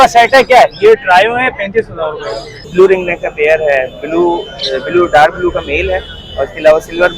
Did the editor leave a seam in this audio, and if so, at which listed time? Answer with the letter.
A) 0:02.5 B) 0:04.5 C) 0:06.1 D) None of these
A